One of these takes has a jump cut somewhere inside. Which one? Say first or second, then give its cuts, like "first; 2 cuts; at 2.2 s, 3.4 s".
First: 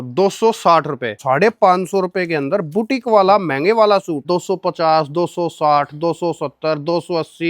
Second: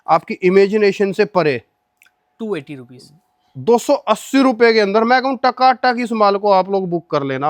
first; 2 cuts; at 1.2 s, 4.2 s